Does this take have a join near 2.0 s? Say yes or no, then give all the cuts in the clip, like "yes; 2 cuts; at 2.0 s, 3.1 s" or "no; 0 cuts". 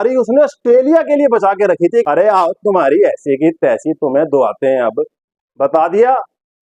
yes; 1 cut; at 2.0 s